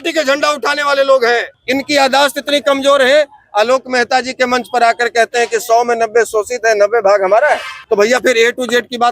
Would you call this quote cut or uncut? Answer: cut